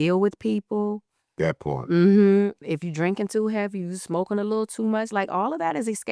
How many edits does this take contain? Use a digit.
1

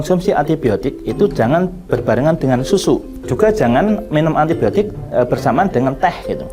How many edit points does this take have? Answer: 1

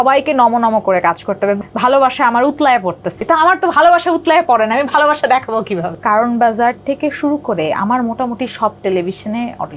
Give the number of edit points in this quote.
3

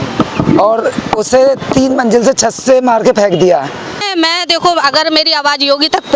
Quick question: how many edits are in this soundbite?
1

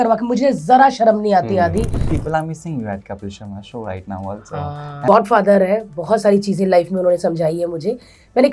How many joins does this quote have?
2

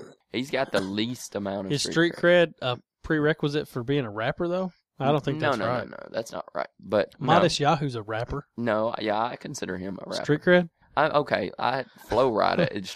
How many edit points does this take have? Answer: 0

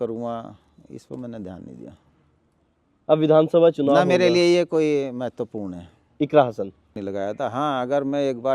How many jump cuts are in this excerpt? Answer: 1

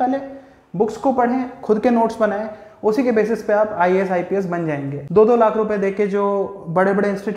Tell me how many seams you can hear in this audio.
1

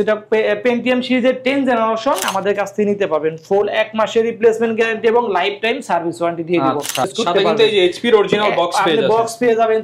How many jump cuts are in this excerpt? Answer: 2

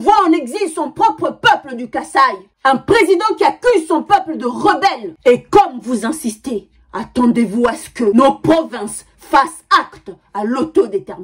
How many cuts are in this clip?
2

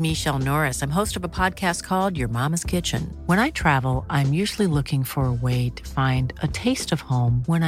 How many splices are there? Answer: 0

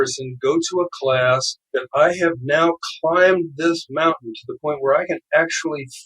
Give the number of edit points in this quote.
1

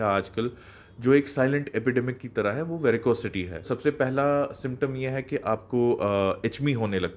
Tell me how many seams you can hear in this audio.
1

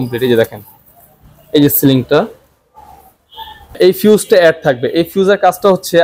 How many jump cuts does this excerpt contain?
1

